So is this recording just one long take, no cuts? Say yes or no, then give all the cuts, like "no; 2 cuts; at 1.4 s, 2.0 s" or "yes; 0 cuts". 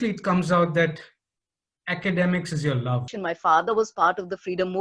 no; 1 cut; at 3.1 s